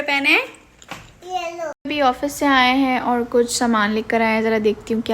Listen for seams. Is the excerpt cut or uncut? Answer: cut